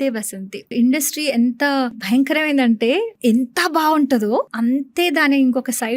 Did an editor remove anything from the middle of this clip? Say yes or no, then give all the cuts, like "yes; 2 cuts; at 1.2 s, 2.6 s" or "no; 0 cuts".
yes; 4 cuts; at 0.7 s, 2.0 s, 3.1 s, 4.5 s